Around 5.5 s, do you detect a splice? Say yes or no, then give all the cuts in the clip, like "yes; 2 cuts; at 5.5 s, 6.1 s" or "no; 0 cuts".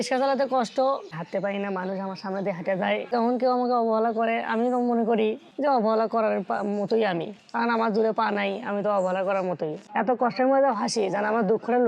no; 3 cuts; at 1.1 s, 3.1 s, 9.8 s